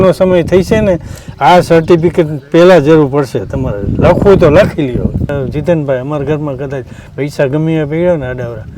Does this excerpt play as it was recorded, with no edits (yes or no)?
no